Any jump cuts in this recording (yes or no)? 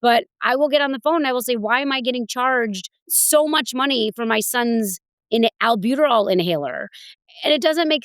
yes